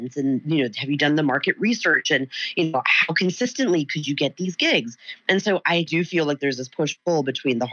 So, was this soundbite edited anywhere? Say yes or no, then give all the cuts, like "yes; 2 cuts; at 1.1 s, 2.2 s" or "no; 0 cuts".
yes; 1 cut; at 5.7 s